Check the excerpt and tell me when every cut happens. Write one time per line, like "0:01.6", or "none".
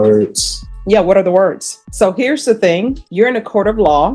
0:01.8
0:03.0